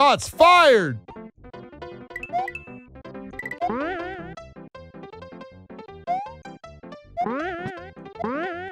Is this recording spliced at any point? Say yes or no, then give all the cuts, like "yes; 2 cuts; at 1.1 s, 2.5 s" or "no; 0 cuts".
no; 0 cuts